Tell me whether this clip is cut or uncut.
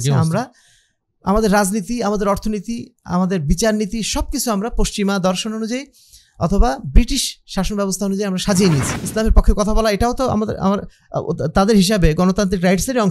cut